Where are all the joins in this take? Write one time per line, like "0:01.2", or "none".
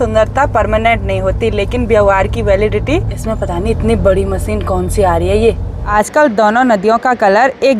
0:03.2
0:05.7

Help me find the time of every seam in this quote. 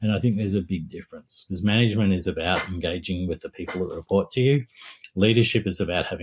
none

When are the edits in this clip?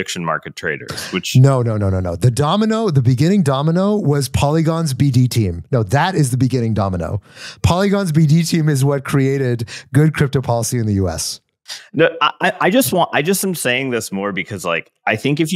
none

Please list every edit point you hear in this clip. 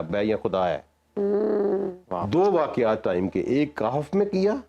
0:02.0

